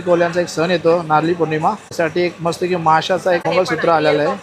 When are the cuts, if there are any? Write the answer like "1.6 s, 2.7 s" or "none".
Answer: 1.9 s, 3.4 s